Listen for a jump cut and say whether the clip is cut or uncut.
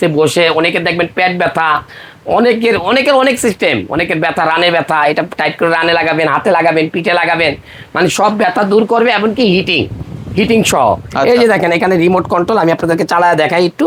uncut